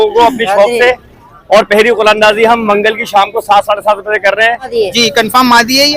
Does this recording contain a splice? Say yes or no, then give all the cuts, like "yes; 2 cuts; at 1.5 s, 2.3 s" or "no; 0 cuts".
yes; 1 cut; at 4.7 s